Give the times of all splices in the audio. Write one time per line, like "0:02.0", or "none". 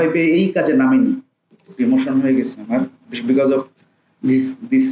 0:01.7